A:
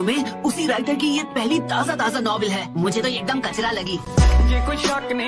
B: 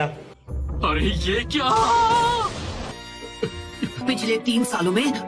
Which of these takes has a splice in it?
B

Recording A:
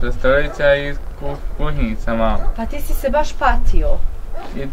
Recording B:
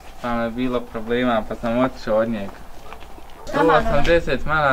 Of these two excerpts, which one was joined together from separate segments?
B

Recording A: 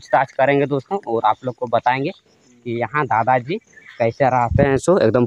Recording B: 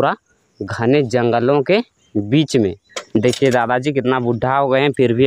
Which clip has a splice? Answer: B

